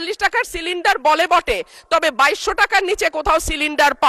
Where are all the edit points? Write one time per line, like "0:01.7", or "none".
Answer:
none